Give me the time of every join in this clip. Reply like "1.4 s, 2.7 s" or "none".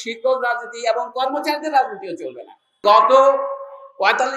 2.9 s

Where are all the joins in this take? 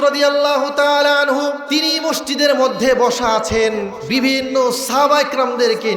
1.6 s, 4.0 s

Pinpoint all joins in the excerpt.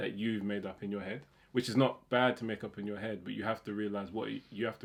none

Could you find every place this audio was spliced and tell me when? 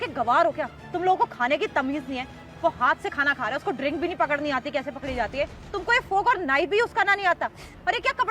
5.6 s

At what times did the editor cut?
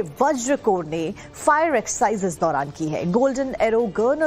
3.0 s

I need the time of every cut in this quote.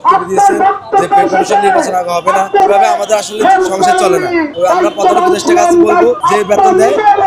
2.6 s, 4.5 s, 6.2 s

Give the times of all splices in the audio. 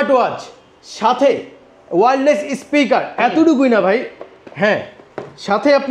none

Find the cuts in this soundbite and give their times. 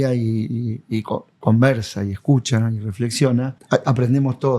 3.6 s

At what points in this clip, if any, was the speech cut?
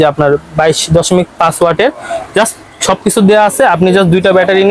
none

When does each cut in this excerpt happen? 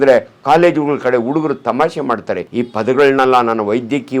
2.5 s

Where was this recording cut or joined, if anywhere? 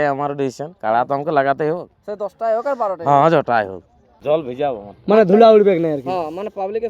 4.1 s

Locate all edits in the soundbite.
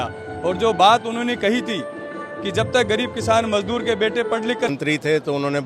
4.7 s

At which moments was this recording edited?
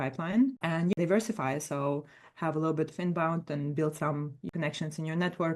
0.9 s, 4.5 s

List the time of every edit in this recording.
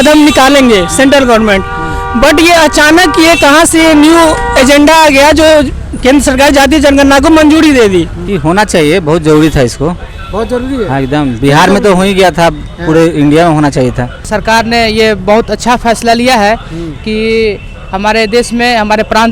8.2 s, 14.3 s

